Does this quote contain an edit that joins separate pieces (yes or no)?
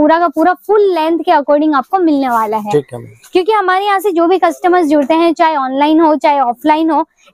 no